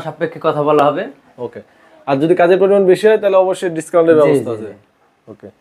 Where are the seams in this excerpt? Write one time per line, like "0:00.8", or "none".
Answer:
none